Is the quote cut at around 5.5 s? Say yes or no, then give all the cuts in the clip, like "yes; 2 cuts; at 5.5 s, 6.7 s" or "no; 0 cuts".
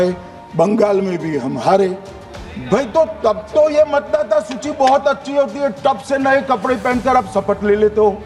no; 0 cuts